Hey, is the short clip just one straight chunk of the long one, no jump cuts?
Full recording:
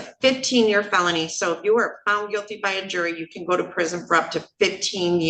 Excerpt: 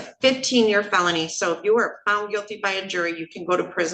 yes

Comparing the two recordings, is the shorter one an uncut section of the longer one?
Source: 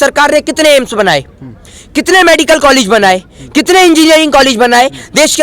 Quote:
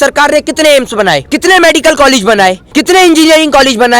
no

